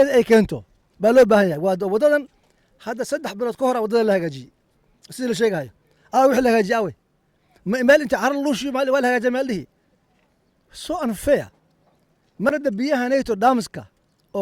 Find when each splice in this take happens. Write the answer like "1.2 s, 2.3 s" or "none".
12.5 s